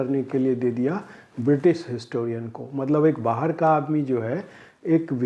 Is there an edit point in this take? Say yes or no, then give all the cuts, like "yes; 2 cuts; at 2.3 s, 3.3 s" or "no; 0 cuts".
no; 0 cuts